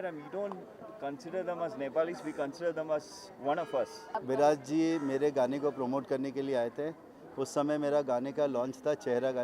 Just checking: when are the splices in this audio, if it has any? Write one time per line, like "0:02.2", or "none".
0:04.2